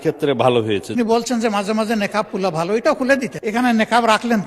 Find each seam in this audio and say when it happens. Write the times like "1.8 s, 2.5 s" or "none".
0.9 s, 3.3 s